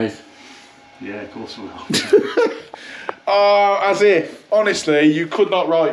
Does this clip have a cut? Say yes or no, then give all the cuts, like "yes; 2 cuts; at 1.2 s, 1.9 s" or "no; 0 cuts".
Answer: no; 0 cuts